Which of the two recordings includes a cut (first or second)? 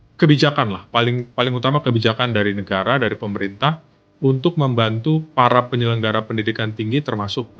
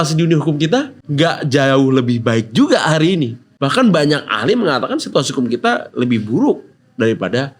second